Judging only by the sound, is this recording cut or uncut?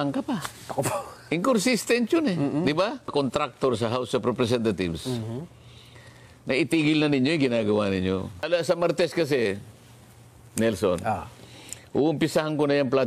cut